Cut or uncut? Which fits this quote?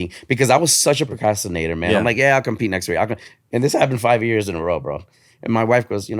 cut